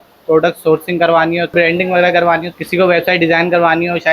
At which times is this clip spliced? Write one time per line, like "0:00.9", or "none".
0:01.5
0:02.6